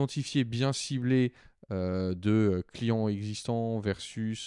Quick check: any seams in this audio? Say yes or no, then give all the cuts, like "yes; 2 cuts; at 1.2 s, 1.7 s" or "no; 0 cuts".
no; 0 cuts